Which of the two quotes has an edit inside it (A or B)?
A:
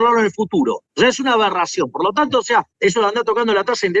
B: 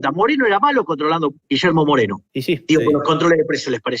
B